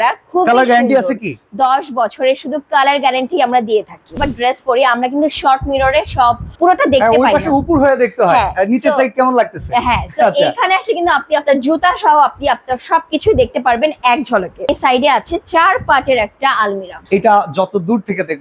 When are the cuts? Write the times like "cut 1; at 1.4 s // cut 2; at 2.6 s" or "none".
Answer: cut 1; at 4.1 s // cut 2; at 6.5 s // cut 3; at 14.7 s // cut 4; at 17.0 s